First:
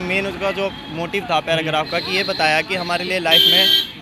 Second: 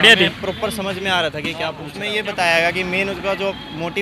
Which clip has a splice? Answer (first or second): second